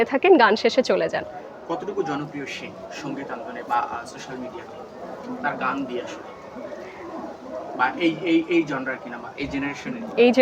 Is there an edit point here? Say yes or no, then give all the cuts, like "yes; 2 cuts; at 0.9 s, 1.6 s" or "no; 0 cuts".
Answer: no; 0 cuts